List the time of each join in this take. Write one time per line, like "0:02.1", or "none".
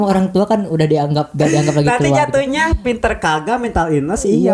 none